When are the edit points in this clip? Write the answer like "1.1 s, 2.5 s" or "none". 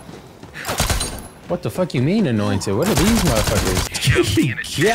3.9 s